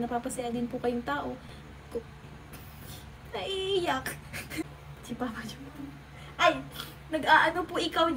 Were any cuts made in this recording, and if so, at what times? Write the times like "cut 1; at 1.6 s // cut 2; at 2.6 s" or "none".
cut 1; at 4.7 s